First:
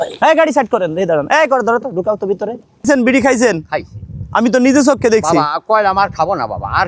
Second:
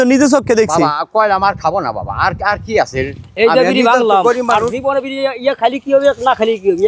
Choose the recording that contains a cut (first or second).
first